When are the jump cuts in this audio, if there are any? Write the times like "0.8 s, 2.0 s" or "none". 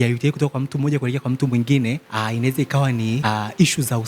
2.1 s, 3.2 s